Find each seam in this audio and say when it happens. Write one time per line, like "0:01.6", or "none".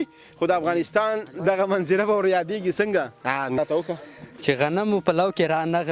0:03.6